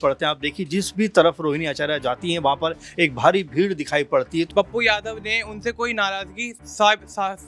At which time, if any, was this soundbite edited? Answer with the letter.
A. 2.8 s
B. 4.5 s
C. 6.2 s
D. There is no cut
B